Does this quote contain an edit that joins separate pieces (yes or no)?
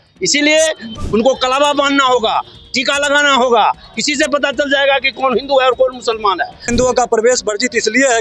yes